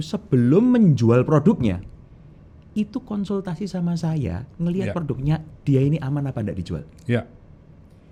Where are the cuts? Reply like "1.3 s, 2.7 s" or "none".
none